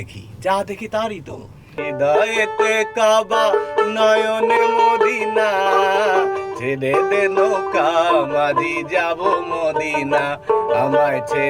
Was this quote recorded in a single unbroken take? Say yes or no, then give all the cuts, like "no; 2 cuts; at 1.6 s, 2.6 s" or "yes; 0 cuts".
no; 1 cut; at 1.8 s